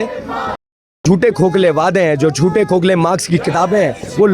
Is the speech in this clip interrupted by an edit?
no; 0 cuts

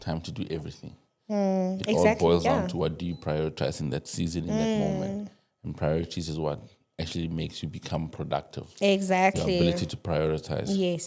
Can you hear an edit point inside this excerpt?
no; 0 cuts

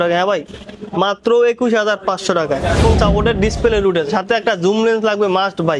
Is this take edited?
yes; 1 cut; at 2.8 s

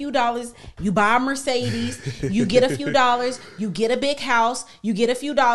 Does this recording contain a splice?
no; 0 cuts

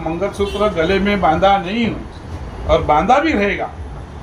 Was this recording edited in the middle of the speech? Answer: no; 0 cuts

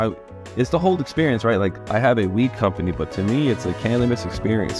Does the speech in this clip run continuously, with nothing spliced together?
yes; 0 cuts

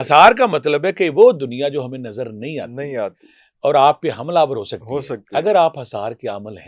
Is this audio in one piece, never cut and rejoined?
yes; 0 cuts

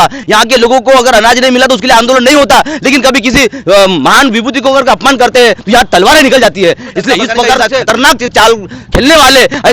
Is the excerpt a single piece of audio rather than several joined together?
no; 1 cut; at 7.7 s

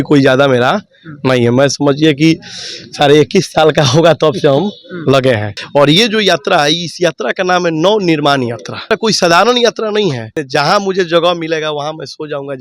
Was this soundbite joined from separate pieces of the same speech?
yes; 3 cuts; at 5.6 s, 9.0 s, 10.4 s

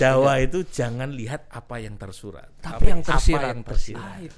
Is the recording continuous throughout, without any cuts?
yes; 0 cuts

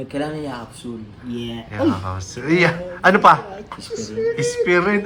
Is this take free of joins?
yes; 0 cuts

